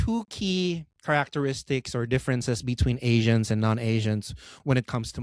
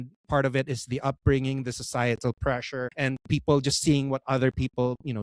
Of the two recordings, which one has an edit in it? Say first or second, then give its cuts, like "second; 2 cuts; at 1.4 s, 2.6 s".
second; 1 cut; at 2.9 s